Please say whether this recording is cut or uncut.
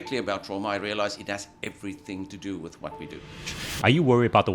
cut